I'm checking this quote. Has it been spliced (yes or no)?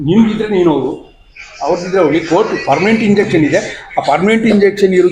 no